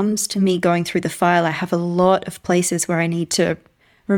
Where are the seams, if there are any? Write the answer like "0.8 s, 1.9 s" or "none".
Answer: none